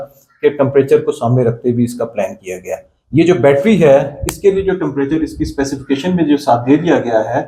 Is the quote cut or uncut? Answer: uncut